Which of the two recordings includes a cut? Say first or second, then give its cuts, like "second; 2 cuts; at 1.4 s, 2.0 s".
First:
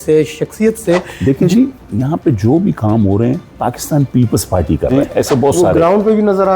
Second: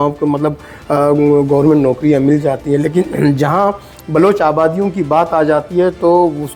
first; 2 cuts; at 1.1 s, 4.9 s